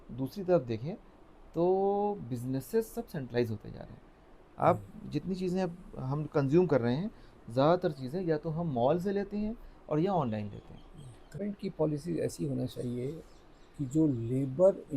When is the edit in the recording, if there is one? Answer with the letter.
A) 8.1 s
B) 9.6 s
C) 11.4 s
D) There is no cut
C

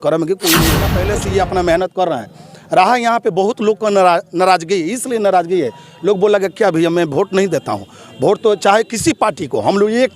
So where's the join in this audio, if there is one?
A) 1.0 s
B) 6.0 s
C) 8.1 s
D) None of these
A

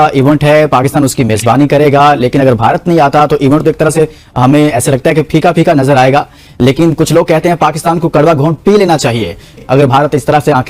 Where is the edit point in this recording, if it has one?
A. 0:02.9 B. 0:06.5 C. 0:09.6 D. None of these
C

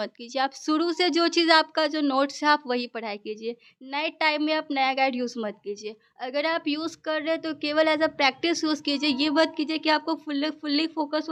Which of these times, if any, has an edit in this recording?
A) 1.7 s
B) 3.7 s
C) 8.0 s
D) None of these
D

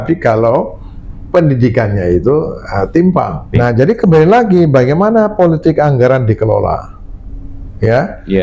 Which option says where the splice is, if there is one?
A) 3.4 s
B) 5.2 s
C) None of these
A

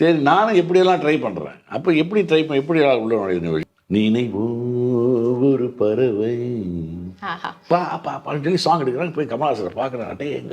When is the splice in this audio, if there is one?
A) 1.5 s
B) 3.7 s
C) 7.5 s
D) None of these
B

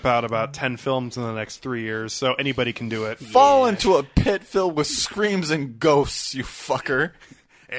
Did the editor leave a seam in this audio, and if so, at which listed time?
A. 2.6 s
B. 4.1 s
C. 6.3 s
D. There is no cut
D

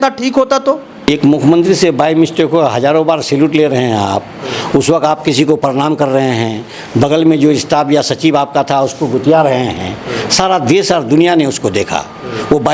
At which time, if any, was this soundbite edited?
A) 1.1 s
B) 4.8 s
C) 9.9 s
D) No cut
A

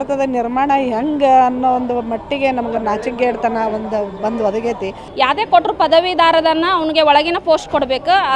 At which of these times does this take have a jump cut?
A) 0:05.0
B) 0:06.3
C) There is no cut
A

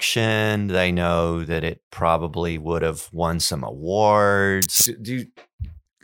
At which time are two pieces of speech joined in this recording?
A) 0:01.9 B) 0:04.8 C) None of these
B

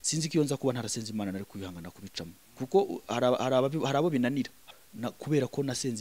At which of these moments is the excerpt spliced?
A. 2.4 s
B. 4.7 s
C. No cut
B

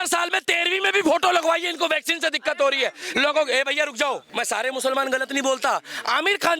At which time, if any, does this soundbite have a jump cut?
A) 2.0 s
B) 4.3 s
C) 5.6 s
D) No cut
B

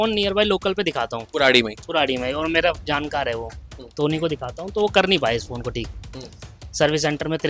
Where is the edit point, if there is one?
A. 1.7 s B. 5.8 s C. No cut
C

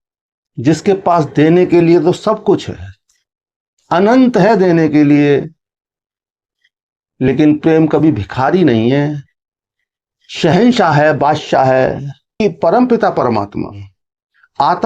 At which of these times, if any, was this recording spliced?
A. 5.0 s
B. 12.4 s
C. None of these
B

